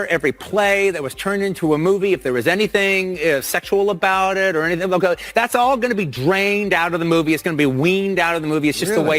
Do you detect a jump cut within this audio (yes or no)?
no